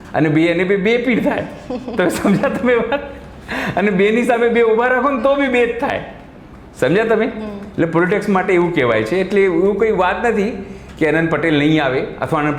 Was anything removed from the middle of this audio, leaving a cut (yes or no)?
no